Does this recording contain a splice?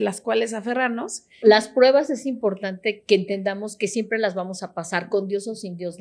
yes; 2 cuts; at 1.4 s, 2.9 s

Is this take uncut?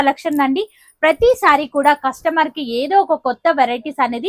yes; 0 cuts

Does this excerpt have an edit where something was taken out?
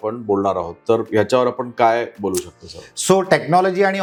no; 0 cuts

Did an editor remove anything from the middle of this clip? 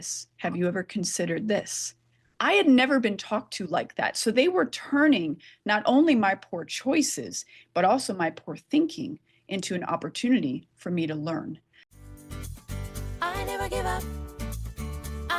yes; 1 cut; at 12.0 s

